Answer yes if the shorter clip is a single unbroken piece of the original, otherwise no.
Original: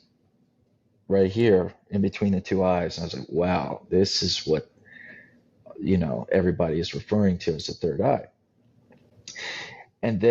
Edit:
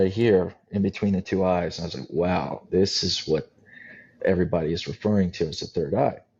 no